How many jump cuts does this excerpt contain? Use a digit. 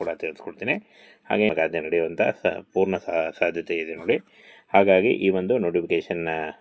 1